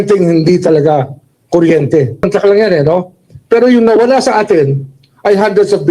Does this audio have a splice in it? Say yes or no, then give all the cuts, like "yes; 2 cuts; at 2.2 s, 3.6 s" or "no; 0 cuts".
yes; 1 cut; at 2.3 s